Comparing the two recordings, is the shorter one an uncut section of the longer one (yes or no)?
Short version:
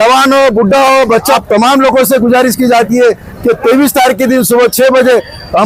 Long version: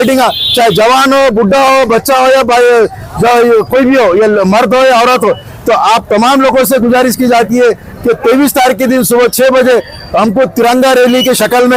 no